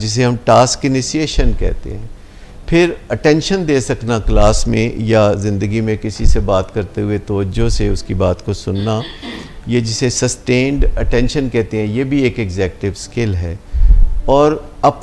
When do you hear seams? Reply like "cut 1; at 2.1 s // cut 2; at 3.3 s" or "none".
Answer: none